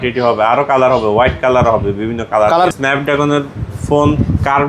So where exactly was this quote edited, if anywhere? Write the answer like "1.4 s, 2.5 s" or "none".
2.7 s